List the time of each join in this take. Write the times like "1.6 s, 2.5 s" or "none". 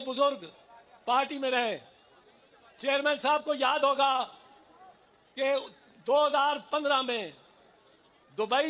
none